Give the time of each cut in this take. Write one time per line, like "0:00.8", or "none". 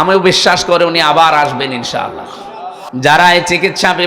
0:02.7